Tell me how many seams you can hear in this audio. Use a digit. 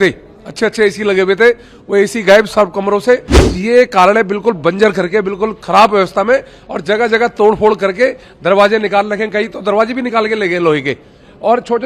1